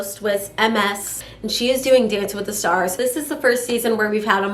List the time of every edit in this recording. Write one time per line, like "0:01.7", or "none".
0:01.1
0:02.9